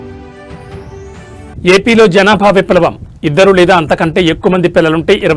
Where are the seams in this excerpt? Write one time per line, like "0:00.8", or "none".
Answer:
0:01.5